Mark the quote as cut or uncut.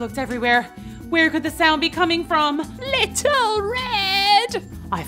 uncut